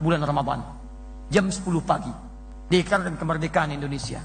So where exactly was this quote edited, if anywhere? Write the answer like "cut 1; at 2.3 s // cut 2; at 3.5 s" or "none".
none